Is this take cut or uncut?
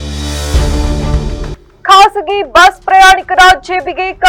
uncut